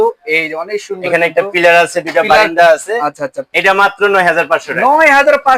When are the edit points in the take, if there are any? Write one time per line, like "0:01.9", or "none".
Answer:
0:03.4